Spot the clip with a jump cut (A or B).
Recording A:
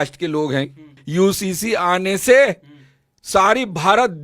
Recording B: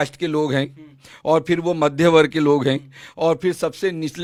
A